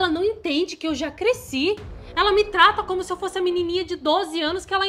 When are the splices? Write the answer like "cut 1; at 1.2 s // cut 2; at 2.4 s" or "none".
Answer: none